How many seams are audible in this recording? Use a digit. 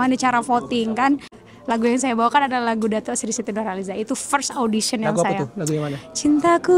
1